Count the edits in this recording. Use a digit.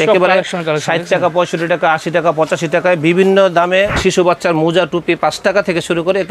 1